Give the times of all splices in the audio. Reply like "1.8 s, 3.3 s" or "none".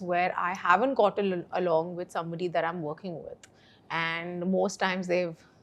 none